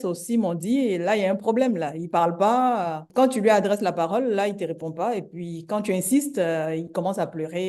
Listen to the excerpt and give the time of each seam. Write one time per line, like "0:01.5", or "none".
0:03.0